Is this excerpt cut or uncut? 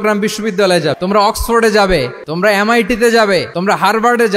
cut